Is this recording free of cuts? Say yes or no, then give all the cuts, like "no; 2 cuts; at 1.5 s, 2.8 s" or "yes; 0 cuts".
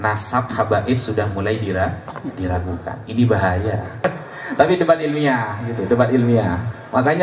no; 1 cut; at 4.0 s